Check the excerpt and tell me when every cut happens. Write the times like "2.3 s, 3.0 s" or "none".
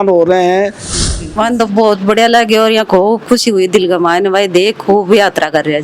1.1 s